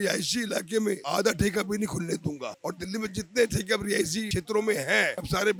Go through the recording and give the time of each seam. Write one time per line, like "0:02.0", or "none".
none